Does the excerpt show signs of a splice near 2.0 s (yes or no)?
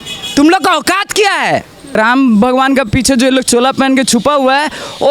yes